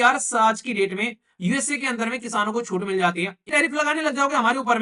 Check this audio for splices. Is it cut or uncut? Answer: cut